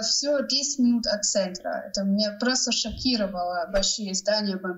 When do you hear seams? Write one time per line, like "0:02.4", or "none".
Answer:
0:03.7